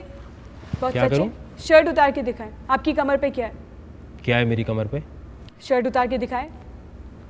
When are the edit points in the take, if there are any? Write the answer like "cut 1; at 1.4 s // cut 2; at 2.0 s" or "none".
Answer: none